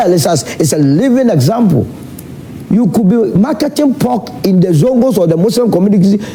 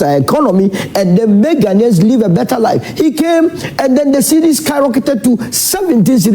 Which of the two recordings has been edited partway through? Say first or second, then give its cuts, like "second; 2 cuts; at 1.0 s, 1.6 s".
second; 1 cut; at 2.5 s